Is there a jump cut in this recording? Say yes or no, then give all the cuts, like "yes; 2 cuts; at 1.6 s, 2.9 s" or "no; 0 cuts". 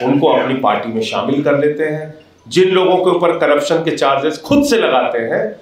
no; 0 cuts